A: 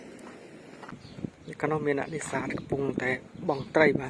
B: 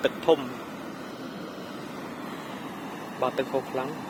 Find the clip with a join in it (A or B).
A